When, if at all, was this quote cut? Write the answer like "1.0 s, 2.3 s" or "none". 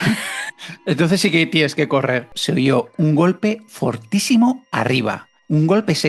2.3 s